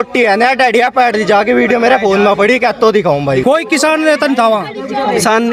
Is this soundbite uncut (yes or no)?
no